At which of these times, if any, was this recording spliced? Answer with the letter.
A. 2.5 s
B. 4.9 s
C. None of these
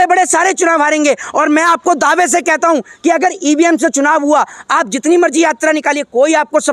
C